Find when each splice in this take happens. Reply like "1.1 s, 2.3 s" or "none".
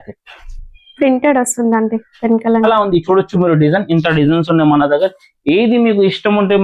2.6 s